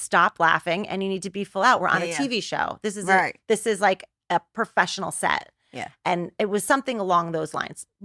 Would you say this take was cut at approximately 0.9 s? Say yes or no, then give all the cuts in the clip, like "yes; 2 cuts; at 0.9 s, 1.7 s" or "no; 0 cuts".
no; 0 cuts